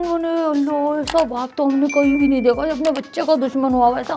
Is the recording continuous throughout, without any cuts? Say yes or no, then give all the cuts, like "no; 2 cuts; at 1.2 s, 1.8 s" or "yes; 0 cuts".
yes; 0 cuts